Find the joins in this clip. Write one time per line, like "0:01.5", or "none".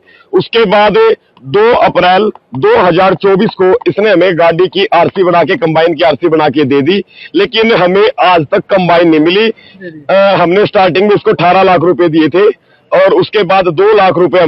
0:09.7